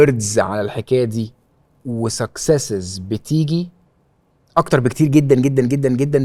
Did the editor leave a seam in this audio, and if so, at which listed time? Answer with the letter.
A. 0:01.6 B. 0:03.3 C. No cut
C